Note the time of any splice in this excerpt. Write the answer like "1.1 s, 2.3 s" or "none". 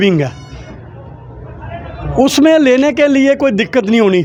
none